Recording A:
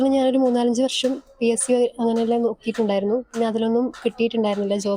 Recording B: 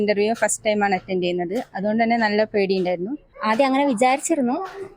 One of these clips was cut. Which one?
B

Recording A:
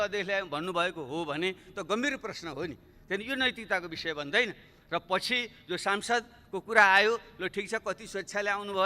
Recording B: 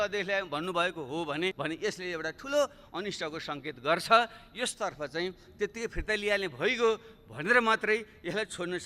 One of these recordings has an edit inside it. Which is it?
B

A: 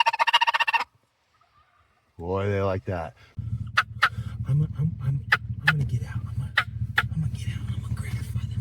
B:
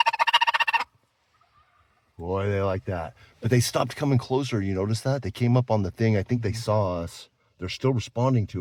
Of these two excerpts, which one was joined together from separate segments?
A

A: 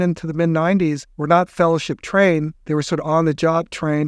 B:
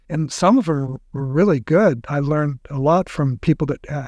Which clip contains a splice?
A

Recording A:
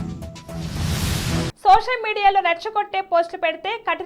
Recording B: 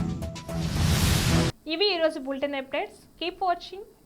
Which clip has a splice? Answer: A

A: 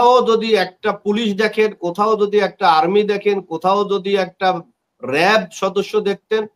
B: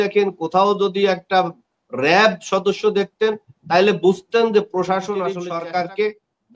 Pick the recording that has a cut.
B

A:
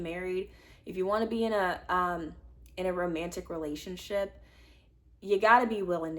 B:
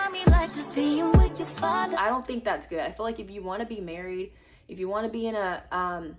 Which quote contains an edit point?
B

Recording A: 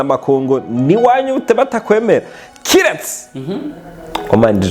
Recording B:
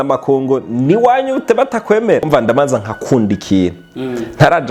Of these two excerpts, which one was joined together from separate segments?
B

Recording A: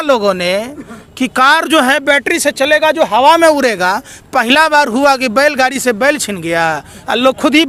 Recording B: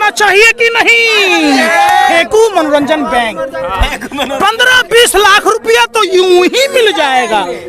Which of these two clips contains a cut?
B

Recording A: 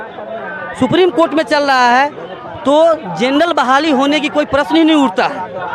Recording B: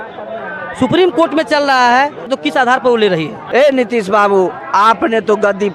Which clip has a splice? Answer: B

